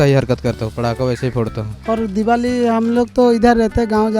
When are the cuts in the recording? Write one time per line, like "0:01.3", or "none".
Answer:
none